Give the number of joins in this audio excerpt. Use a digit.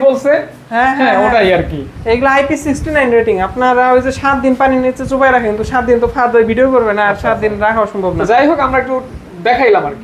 0